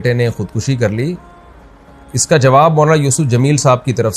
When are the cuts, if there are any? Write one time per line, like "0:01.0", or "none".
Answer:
none